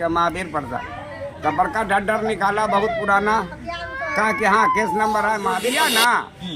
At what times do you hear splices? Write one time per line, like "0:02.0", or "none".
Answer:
0:05.7